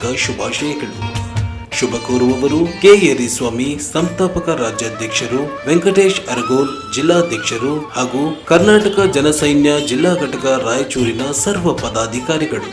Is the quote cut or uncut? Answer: uncut